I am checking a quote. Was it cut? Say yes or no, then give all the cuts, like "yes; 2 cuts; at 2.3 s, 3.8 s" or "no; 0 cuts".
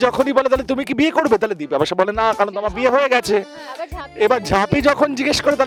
no; 0 cuts